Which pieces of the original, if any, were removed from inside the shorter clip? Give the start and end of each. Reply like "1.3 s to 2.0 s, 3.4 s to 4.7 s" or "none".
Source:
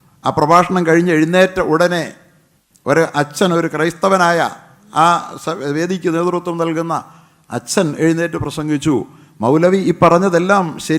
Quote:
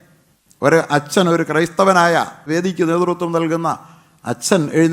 4.7 s to 5.7 s